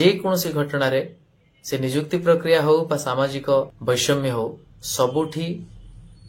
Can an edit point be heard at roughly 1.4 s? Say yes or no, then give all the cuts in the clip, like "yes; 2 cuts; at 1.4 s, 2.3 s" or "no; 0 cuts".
no; 1 cut; at 3.7 s